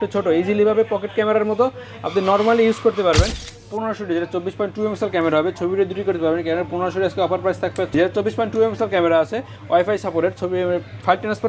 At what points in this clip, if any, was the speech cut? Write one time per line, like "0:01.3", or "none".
0:03.4
0:07.9